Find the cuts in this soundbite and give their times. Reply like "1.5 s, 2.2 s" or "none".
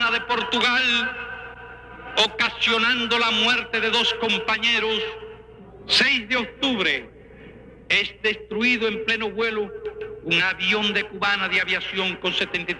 8.2 s